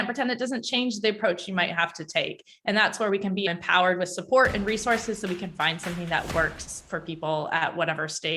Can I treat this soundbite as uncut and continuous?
no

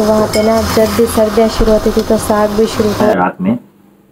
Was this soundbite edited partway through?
yes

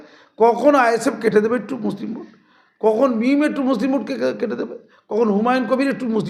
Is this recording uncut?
yes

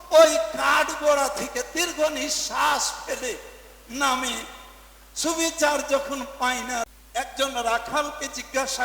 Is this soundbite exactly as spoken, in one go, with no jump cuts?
no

